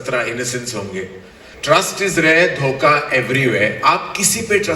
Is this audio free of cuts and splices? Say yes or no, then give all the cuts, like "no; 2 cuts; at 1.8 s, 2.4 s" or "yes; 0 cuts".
no; 1 cut; at 1.5 s